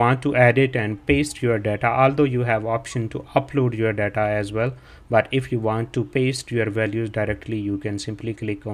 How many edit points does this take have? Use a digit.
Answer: 0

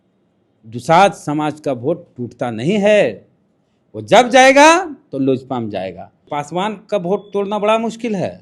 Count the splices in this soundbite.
1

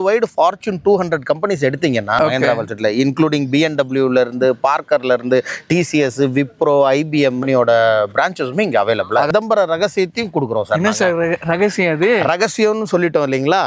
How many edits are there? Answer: 3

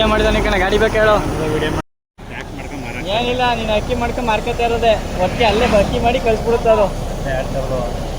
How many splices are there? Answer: 1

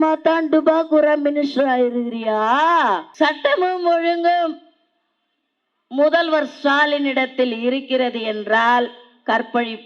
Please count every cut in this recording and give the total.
1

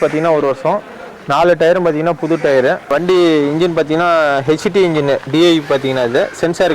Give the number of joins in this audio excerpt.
1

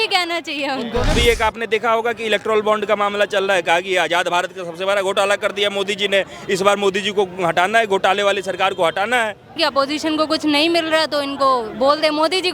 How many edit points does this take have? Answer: 2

